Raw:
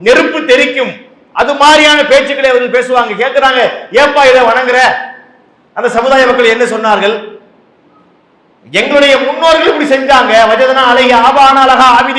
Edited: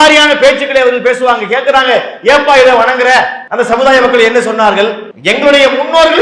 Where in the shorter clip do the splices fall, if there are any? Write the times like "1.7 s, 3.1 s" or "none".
3.4 s, 5.1 s